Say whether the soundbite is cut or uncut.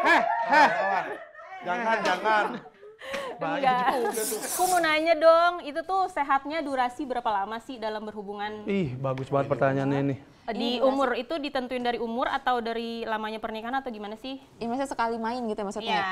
cut